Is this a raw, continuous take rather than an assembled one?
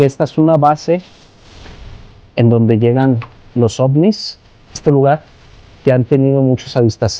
no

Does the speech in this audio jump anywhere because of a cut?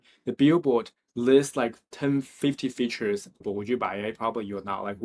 yes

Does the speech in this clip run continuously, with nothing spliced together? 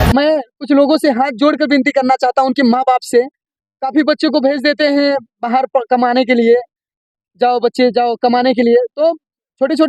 yes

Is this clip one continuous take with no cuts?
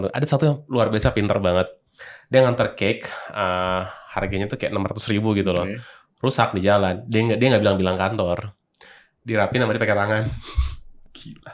yes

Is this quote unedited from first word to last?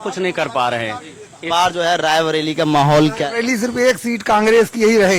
no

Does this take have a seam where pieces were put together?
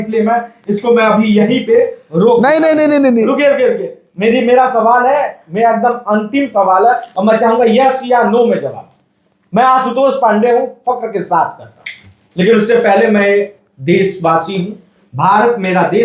no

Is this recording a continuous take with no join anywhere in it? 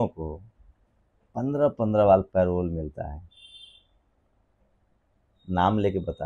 yes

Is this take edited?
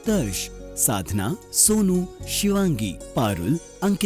no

